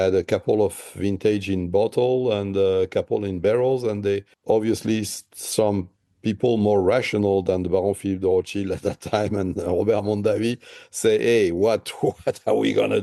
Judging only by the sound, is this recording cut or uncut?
uncut